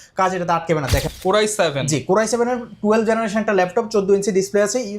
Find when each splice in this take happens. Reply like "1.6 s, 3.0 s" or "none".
1.1 s